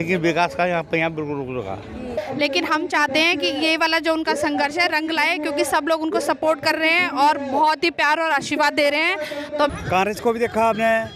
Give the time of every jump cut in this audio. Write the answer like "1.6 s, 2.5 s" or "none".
2.2 s, 9.7 s